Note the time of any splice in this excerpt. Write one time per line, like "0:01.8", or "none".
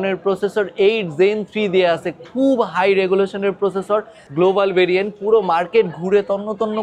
0:04.2

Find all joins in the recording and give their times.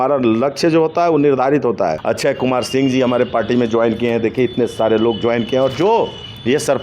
0:02.0

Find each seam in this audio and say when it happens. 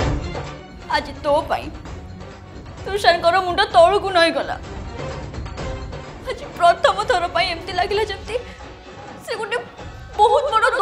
0:06.1

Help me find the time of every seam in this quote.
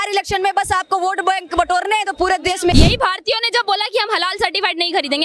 0:02.7

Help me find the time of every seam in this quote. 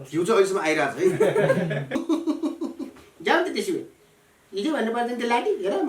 0:02.0

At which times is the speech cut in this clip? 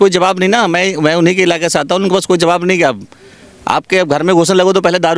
none

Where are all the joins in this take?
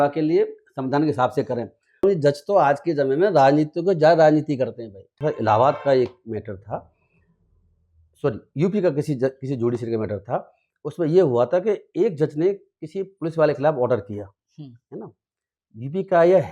0:02.0
0:05.1

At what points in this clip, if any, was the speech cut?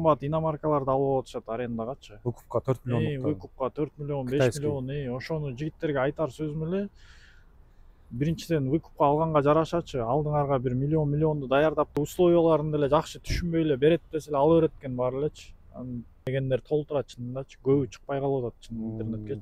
0:12.0
0:16.2

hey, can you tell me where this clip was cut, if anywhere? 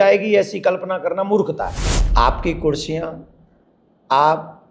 0:01.8

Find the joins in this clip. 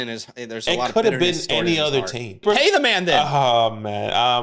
0:02.4

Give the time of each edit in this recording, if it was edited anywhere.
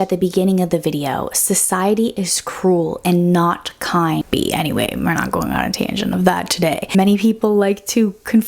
0:04.2
0:06.9

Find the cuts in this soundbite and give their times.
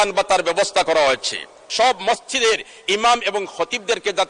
0:01.6

